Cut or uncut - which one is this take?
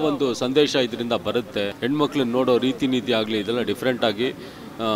cut